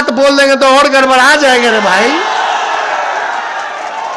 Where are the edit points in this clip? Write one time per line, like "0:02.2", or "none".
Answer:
none